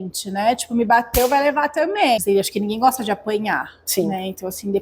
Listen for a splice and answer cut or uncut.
cut